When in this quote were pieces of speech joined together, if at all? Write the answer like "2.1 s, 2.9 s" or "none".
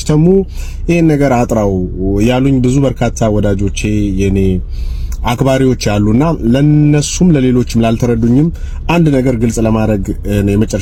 none